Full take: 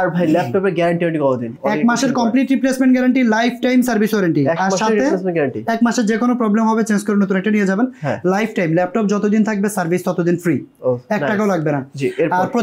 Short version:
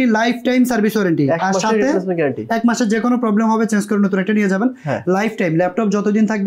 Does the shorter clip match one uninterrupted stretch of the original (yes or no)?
yes